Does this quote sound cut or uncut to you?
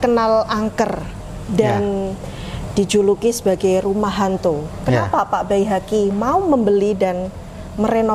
uncut